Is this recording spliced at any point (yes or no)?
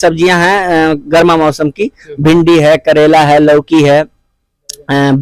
no